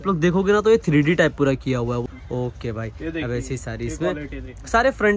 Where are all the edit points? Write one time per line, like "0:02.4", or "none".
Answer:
0:02.0